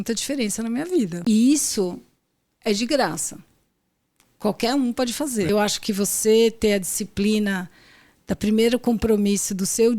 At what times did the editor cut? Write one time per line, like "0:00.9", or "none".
0:01.2
0:05.5